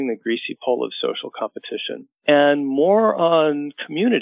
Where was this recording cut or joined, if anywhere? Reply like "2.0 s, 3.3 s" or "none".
2.0 s